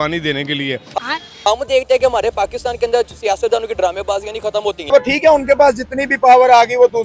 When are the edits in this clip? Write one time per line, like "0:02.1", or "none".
0:01.1
0:04.8